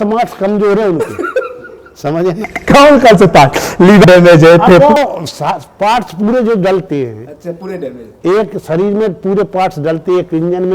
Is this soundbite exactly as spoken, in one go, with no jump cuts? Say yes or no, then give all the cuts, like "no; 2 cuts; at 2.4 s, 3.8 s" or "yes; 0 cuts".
yes; 0 cuts